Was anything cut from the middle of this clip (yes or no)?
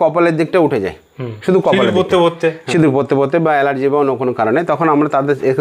no